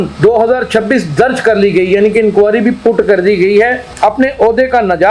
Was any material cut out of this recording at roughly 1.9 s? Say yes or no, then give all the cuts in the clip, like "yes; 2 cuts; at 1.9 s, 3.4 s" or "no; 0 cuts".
no; 1 cut; at 3.9 s